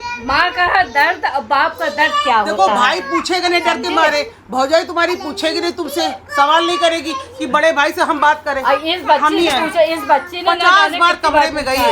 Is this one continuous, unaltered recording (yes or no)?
yes